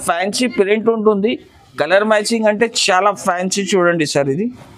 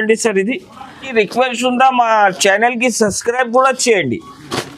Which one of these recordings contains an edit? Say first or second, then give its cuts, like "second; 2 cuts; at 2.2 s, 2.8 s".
second; 1 cut; at 1.0 s